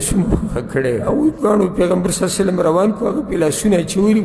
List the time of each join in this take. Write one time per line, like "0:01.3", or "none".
0:01.0